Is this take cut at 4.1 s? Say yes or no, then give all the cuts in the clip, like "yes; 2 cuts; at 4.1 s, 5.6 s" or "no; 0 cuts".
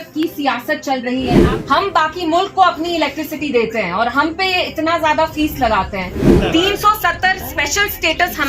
no; 2 cuts; at 1.5 s, 6.2 s